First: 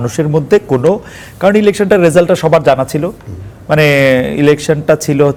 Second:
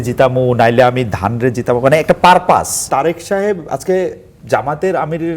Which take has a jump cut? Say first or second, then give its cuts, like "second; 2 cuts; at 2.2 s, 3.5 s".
second; 1 cut; at 2.8 s